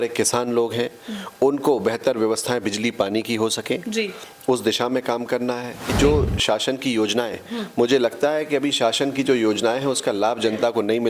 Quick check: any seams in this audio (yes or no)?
yes